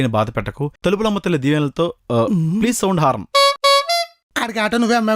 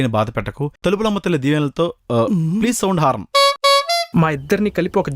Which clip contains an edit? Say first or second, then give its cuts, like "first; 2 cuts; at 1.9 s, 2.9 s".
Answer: second; 1 cut; at 4.1 s